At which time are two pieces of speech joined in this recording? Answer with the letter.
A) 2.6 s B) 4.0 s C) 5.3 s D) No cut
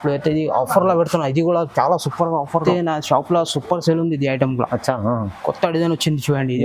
A